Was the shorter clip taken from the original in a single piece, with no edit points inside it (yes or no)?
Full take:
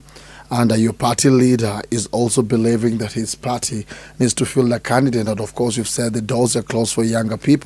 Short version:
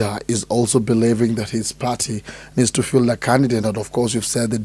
yes